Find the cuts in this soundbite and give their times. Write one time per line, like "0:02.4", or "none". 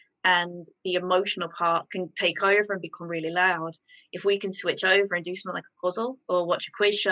none